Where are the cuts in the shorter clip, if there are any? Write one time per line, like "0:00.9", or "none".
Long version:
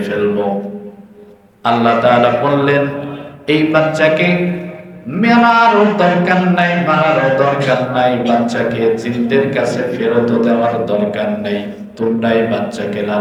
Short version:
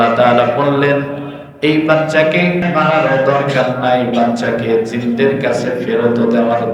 0:02.6